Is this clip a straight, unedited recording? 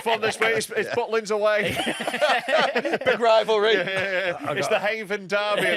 yes; 0 cuts

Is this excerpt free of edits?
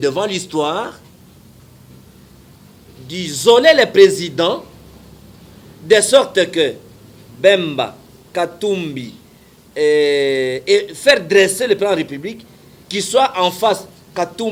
yes; 0 cuts

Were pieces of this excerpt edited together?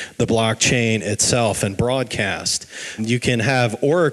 yes; 1 cut; at 3.0 s

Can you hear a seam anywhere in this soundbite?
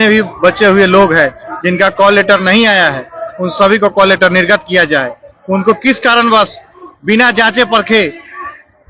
no; 0 cuts

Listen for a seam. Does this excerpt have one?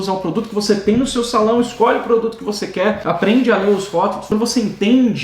yes; 1 cut; at 4.2 s

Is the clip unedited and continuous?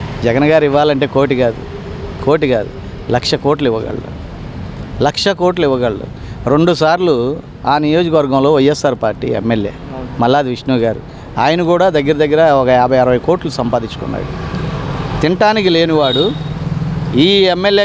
yes; 0 cuts

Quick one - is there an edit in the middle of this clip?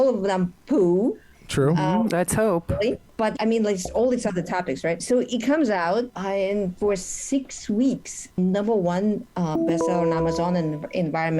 yes; 4 cuts; at 3.3 s, 5.0 s, 6.2 s, 8.4 s

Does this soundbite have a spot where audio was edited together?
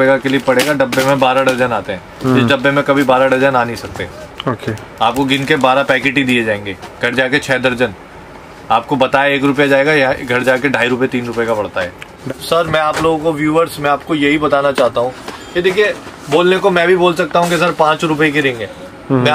yes; 1 cut; at 12.2 s

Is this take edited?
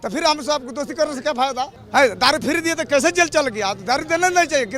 yes; 1 cut; at 1.8 s

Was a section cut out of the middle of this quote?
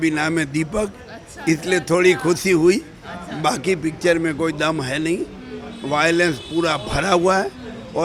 no; 0 cuts

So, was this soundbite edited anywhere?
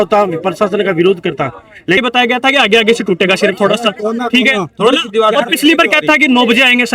yes; 1 cut; at 2.0 s

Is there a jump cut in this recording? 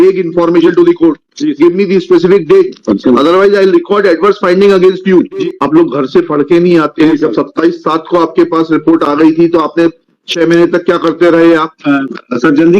yes; 4 cuts; at 2.8 s, 5.4 s, 7.1 s, 11.7 s

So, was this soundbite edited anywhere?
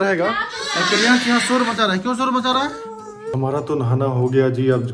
yes; 1 cut; at 3.3 s

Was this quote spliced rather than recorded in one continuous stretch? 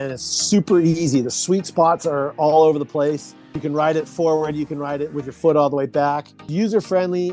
yes; 2 cuts; at 3.6 s, 6.5 s

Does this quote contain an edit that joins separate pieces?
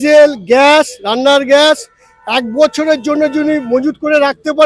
no; 0 cuts

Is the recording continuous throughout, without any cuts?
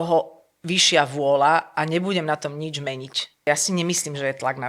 no; 1 cut; at 3.5 s

